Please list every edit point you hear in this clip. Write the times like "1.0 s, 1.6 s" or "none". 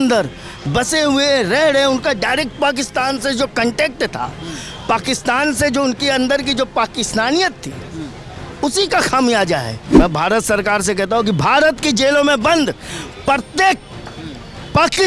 9.8 s